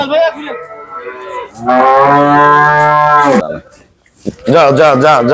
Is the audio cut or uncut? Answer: cut